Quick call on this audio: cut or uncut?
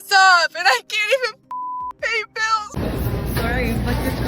cut